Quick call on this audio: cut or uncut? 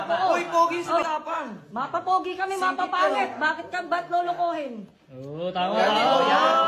cut